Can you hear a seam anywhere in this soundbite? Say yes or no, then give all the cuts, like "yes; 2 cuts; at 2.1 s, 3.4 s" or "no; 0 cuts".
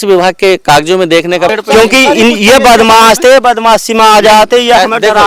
yes; 1 cut; at 1.5 s